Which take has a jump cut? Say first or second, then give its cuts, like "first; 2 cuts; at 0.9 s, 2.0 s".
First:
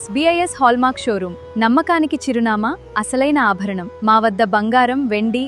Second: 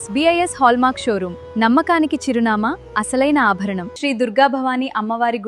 second; 1 cut; at 3.9 s